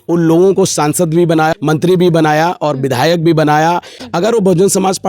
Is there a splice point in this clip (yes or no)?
yes